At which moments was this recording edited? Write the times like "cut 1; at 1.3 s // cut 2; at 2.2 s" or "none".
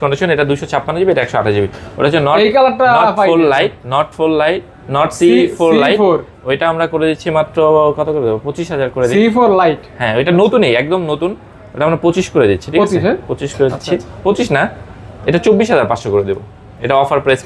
none